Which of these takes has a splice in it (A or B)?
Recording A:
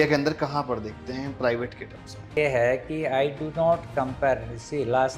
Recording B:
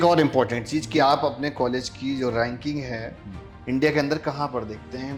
A